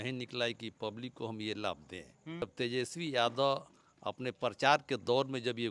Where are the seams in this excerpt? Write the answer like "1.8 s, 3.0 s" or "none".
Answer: 2.4 s